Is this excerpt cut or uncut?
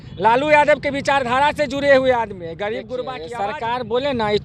cut